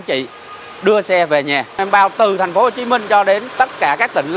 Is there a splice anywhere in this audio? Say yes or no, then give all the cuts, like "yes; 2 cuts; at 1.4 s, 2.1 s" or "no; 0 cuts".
yes; 2 cuts; at 1.8 s, 3.5 s